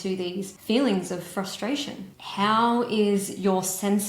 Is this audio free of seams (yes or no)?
no